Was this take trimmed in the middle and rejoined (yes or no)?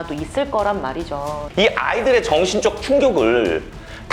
yes